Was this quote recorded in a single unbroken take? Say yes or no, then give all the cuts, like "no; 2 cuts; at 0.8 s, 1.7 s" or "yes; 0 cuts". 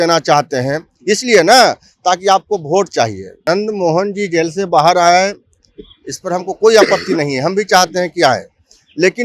no; 1 cut; at 3.4 s